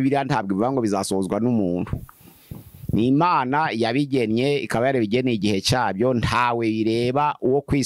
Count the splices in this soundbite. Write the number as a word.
zero